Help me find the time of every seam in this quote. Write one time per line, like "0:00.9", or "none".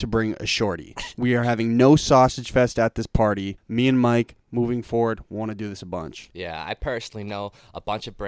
0:03.5